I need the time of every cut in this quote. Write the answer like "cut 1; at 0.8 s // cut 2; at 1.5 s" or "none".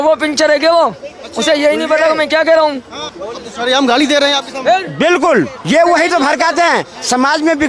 cut 1; at 5.6 s